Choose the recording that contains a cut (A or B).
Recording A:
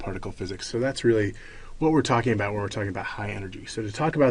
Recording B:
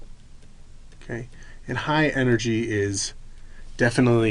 B